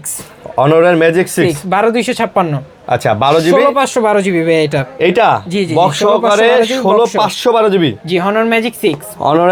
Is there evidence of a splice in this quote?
no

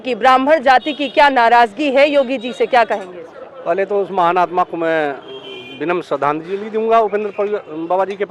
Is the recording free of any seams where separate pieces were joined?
yes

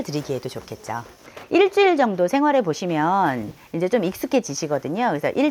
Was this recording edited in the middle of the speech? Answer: yes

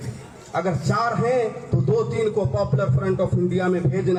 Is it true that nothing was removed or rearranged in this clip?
yes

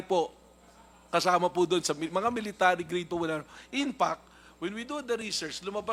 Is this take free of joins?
yes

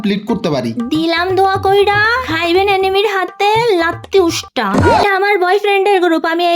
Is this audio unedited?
no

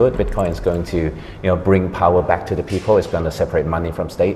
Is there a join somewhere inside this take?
no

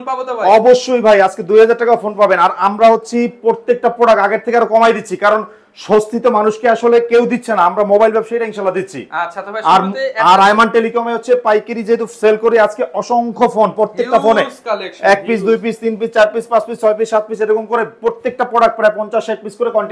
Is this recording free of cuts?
yes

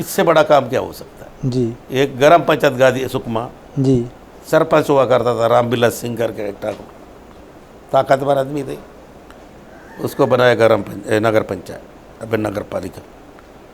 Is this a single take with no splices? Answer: yes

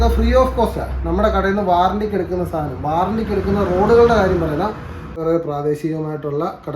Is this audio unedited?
no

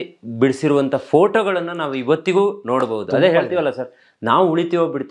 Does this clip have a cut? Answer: no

